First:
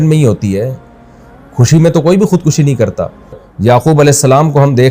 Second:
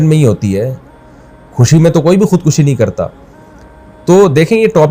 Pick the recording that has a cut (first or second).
first